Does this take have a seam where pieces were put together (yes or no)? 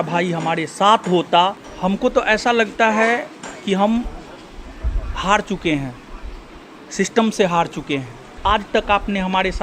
yes